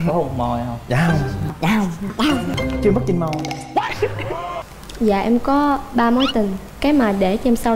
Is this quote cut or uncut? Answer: cut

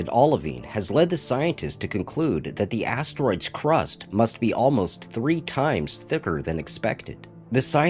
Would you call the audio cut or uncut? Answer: cut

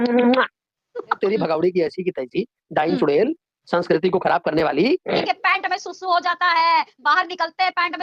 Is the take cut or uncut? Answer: cut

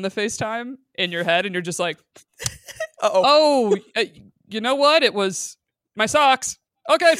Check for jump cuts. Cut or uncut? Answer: uncut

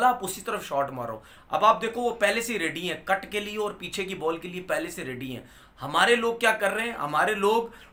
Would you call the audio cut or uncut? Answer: uncut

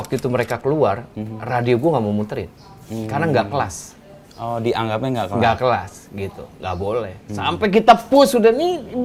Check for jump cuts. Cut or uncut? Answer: uncut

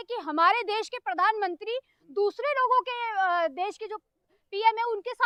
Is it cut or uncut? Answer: uncut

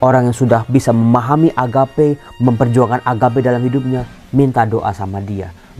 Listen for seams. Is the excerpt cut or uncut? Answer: uncut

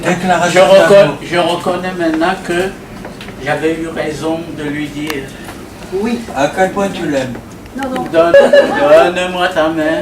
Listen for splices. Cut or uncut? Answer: cut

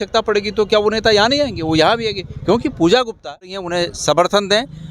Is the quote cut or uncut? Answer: cut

